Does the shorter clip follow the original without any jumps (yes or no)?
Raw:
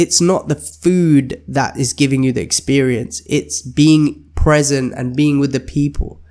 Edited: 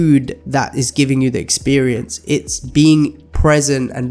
yes